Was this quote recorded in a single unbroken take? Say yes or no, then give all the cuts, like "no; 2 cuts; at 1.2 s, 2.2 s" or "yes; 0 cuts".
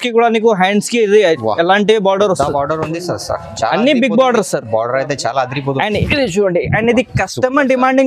no; 1 cut; at 6.0 s